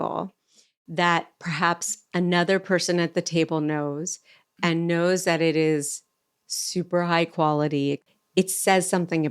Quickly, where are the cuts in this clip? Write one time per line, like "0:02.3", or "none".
0:08.0